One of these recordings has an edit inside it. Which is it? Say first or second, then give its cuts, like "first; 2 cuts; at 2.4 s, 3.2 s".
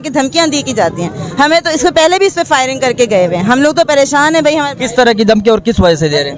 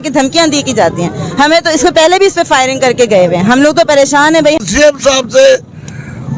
second; 1 cut; at 4.6 s